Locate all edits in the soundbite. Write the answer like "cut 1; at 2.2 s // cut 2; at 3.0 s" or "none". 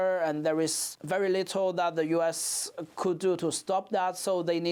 none

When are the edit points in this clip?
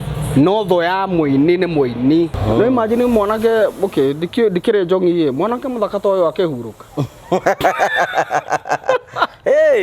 cut 1; at 2.4 s

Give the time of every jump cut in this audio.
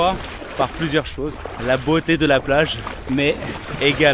none

